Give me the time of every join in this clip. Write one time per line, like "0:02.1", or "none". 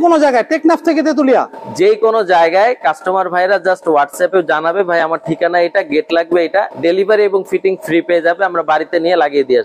0:06.7